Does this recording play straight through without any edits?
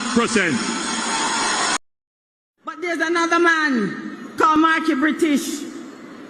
no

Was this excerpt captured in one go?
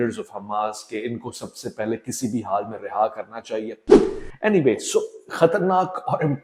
yes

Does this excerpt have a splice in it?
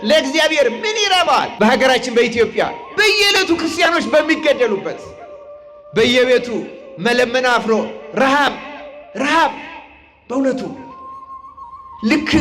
yes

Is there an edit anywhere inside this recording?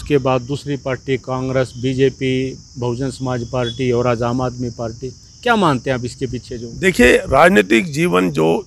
no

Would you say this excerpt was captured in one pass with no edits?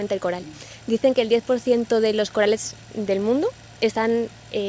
yes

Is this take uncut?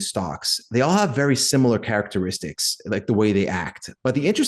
yes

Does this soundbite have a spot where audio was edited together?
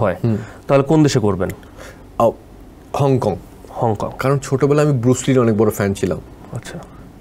no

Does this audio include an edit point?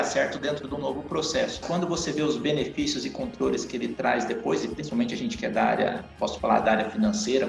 yes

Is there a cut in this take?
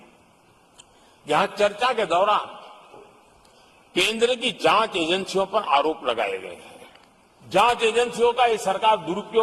no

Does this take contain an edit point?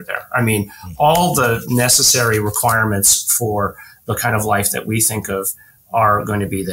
no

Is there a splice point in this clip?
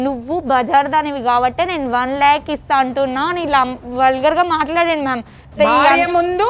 no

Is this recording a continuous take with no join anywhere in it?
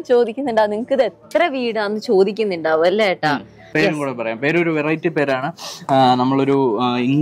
no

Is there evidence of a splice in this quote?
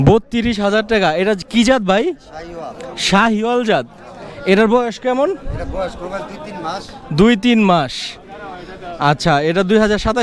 no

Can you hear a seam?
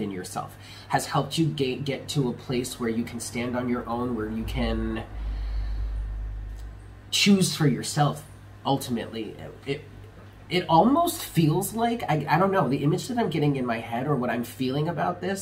no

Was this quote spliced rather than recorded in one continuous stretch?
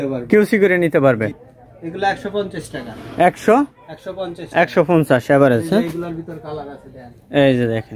yes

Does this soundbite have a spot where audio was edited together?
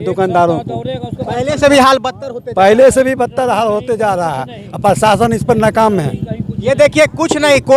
no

